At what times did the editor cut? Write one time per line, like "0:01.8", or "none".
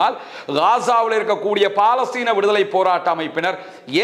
none